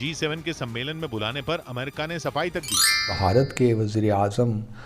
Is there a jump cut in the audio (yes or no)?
yes